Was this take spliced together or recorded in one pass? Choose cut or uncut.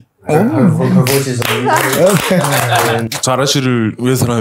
cut